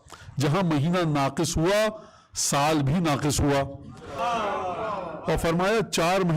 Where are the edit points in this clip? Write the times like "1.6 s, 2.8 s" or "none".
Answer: 4.1 s